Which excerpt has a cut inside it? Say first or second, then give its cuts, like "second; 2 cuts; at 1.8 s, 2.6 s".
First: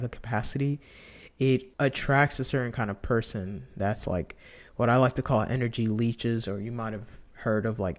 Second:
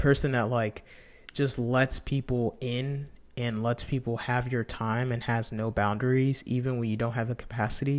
first; 1 cut; at 1.7 s